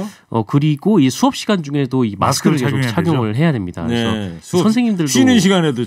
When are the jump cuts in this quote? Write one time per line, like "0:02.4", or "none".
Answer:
none